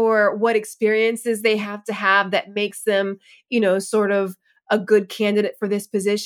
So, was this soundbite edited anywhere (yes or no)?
no